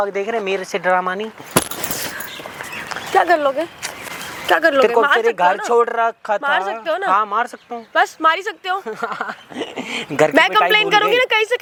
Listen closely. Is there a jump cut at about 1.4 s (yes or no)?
no